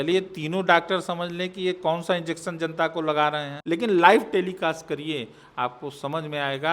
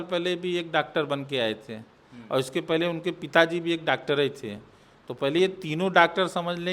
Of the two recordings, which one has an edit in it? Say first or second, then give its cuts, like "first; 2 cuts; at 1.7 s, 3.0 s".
first; 1 cut; at 3.5 s